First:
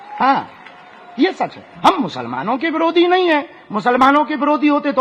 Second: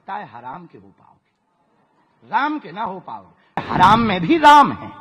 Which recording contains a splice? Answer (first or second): second